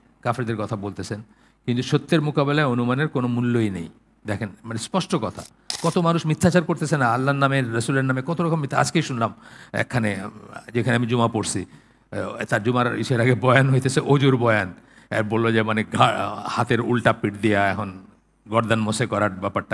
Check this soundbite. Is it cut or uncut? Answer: cut